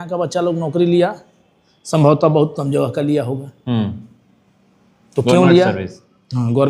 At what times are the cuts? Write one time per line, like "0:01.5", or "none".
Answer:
none